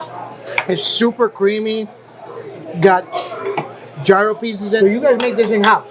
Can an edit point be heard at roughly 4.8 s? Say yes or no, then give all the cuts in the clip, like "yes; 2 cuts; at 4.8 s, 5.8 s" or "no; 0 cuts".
yes; 1 cut; at 4.8 s